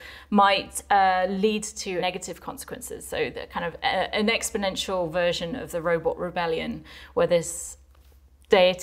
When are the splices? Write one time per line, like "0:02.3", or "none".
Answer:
0:02.0